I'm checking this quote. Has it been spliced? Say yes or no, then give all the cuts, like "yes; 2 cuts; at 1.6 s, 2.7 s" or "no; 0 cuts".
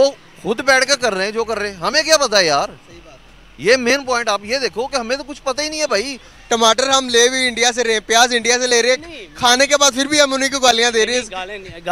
yes; 1 cut; at 6.3 s